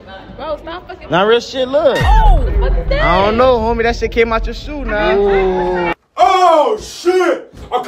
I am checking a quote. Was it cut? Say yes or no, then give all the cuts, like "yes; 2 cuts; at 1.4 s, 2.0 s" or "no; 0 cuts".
no; 0 cuts